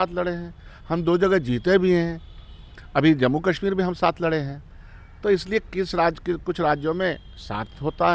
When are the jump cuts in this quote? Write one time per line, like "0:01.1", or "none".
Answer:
none